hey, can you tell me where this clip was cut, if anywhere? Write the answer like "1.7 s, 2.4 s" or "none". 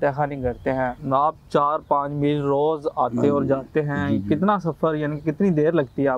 1.0 s